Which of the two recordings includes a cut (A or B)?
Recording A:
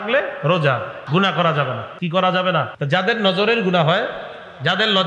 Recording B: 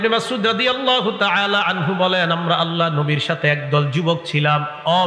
A